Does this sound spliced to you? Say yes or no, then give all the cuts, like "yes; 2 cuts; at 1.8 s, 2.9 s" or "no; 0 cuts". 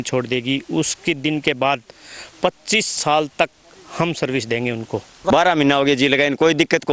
yes; 1 cut; at 5.3 s